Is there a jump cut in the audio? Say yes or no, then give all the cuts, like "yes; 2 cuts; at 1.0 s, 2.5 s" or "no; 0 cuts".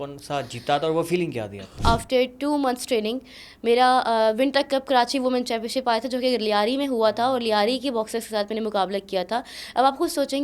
yes; 1 cut; at 1.8 s